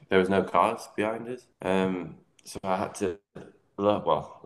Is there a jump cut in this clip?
yes; 1 cut; at 1.5 s

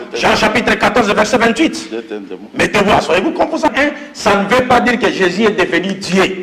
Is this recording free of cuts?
no; 1 cut; at 3.7 s

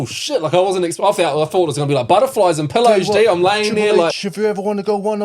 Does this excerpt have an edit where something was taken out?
yes; 1 cut; at 4.2 s

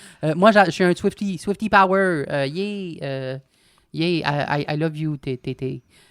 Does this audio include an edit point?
no; 0 cuts

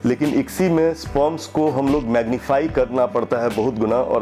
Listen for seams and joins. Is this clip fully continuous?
yes; 0 cuts

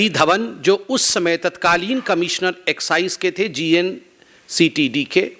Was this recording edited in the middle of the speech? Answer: no; 0 cuts

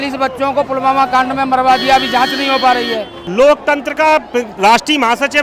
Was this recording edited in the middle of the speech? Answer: yes; 1 cut; at 3.1 s

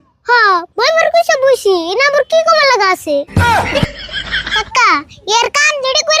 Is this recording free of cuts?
no; 2 cuts; at 3.3 s, 4.5 s

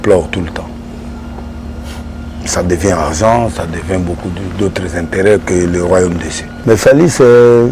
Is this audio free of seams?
no; 1 cut; at 6.5 s

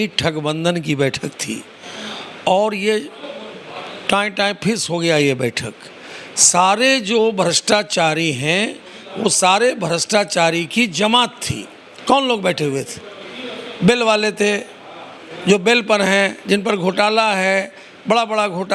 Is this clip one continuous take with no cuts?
yes; 0 cuts

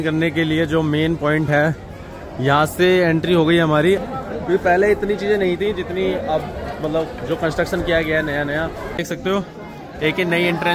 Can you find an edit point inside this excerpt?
yes; 2 cuts; at 4.0 s, 9.0 s

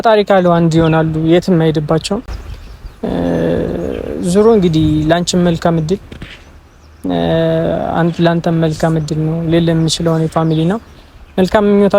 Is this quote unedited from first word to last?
yes; 0 cuts

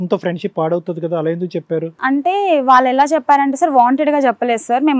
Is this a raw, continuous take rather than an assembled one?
yes; 0 cuts

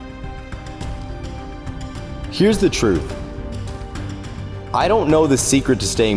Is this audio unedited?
yes; 0 cuts

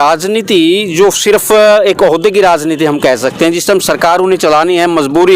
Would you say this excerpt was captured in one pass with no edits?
yes; 0 cuts

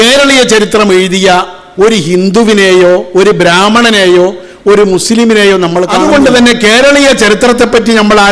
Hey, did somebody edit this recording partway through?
yes; 1 cut; at 6.0 s

